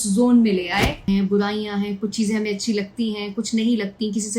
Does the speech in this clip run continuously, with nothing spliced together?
no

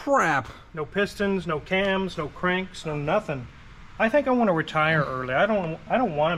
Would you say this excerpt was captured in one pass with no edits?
yes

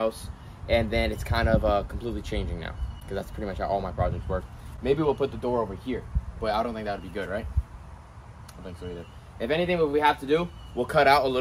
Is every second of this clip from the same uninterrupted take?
yes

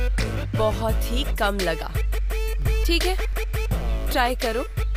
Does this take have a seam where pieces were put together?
no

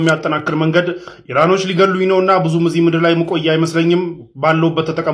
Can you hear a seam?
no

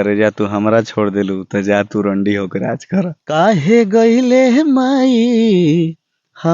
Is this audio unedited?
no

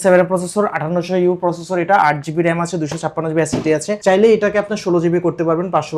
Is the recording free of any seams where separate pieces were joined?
yes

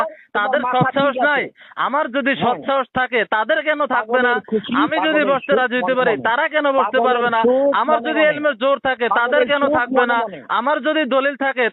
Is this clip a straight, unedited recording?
yes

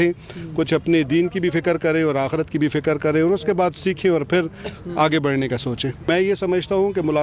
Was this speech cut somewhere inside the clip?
yes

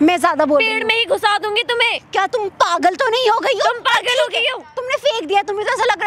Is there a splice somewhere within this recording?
no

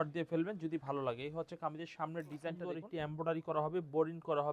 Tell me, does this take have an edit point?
yes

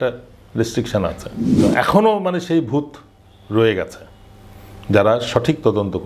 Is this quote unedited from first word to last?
no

